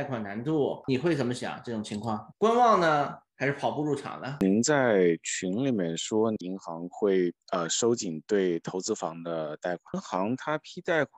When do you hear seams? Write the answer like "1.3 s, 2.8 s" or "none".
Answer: 0.8 s, 4.4 s, 6.4 s, 9.9 s